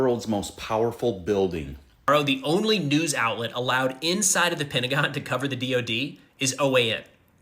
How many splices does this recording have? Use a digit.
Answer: 1